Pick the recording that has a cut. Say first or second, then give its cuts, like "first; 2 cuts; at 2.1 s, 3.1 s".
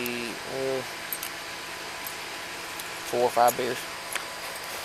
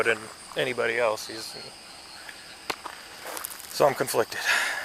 first; 1 cut; at 3.9 s